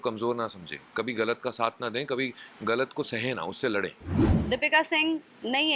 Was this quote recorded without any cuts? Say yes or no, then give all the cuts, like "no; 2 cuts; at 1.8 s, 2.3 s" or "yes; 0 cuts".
no; 1 cut; at 4.2 s